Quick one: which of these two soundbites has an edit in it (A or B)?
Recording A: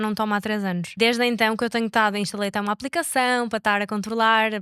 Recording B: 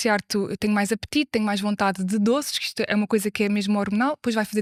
A